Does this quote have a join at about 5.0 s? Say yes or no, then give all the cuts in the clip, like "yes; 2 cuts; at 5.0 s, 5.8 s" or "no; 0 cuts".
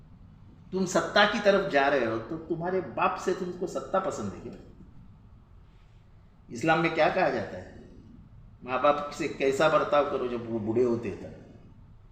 yes; 1 cut; at 5.0 s